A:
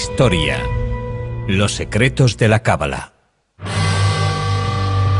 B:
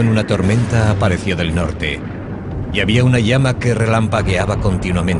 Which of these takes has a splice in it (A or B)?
A